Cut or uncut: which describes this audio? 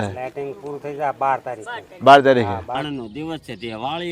cut